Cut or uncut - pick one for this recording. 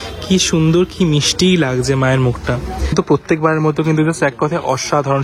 cut